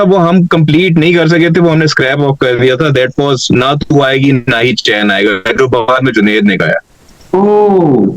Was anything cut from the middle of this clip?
no; 0 cuts

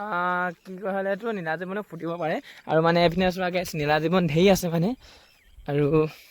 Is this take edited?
no; 0 cuts

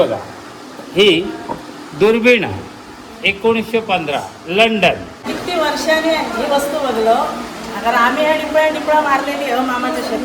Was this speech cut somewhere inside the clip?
yes; 1 cut; at 5.1 s

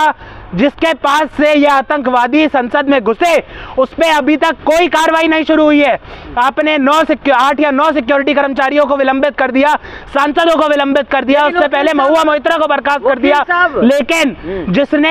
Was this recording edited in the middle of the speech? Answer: no; 0 cuts

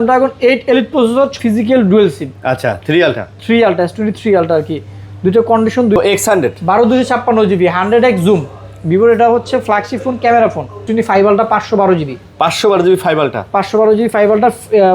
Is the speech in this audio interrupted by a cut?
yes; 3 cuts; at 1.4 s, 6.0 s, 10.9 s

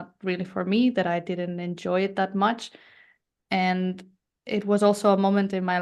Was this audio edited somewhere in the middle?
no; 0 cuts

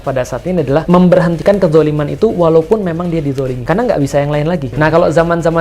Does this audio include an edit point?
yes; 3 cuts; at 0.8 s, 3.6 s, 4.7 s

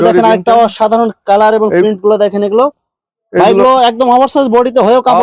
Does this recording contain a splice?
no; 0 cuts

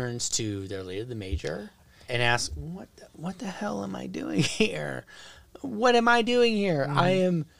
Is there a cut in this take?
yes; 1 cut; at 2.1 s

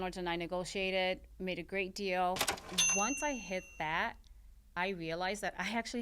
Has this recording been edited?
yes; 1 cut; at 2.5 s

